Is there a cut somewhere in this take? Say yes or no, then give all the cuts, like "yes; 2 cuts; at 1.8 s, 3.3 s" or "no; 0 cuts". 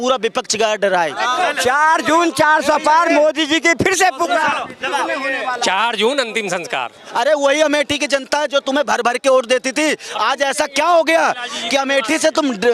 yes; 2 cuts; at 1.3 s, 7.0 s